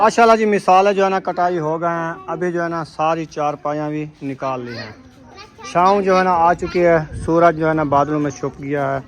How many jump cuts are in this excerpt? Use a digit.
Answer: 0